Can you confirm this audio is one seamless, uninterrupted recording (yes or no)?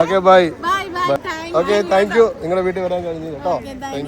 no